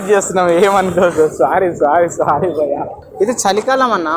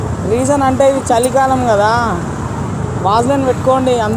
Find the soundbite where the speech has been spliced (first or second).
first